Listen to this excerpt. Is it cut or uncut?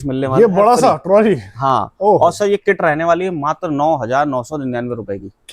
uncut